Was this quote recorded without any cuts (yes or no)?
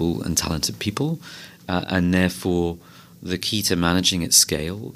yes